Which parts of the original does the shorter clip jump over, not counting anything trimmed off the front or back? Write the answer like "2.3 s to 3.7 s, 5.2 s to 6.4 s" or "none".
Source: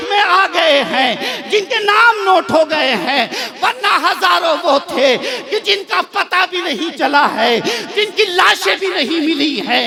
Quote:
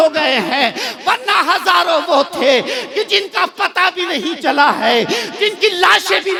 none